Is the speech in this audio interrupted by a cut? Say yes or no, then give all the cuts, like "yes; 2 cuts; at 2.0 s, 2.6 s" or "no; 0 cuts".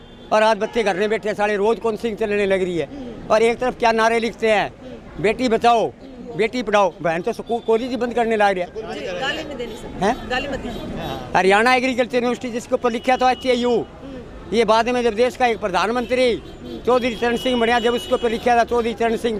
no; 0 cuts